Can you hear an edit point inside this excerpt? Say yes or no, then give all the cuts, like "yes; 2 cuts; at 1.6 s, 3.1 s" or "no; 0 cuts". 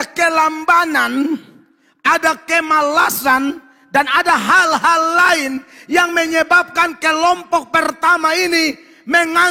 no; 0 cuts